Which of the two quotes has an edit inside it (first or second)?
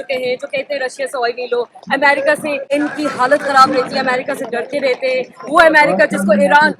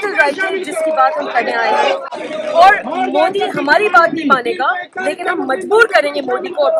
first